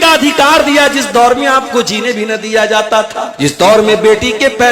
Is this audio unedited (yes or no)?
no